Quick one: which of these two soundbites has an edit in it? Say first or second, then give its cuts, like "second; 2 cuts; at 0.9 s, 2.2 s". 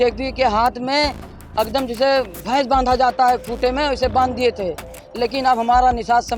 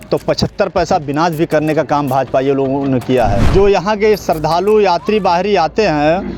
second; 1 cut; at 3.4 s